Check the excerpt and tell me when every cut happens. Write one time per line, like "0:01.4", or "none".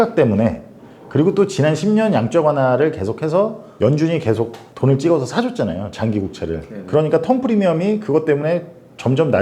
0:03.6
0:04.6